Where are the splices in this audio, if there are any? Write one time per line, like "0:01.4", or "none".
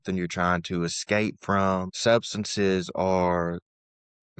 0:01.9

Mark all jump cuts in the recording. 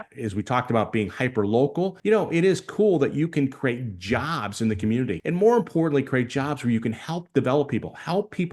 0:02.0
0:05.2

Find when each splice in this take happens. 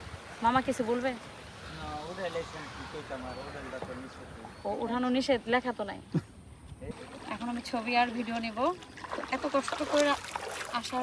0:07.0

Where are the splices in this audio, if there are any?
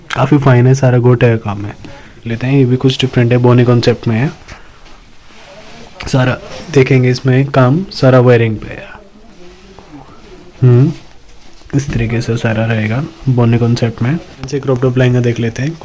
0:02.3
0:14.3

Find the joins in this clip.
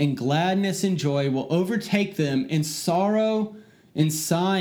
none

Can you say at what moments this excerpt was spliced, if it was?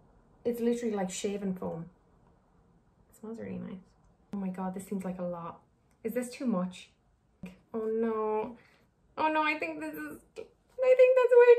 0:07.6

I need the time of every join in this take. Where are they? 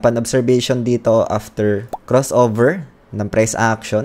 0:01.9

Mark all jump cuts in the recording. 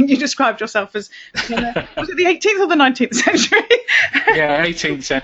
none

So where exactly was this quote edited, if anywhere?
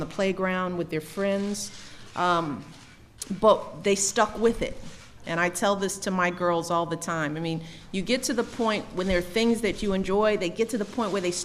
none

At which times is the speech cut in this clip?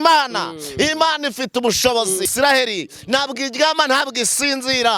0:02.3

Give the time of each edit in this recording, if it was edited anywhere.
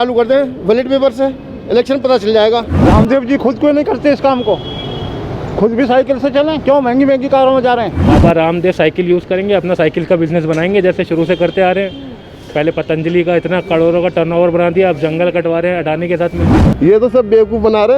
0:02.9
0:08.0
0:16.5

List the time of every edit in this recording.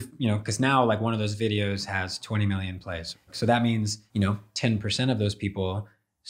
0:03.3
0:04.0

